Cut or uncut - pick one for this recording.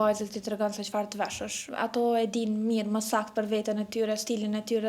cut